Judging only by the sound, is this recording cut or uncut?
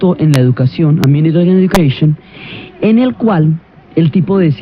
uncut